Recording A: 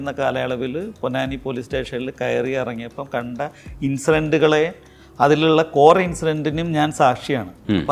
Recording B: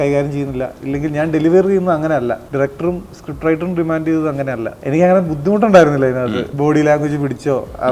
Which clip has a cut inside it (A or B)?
B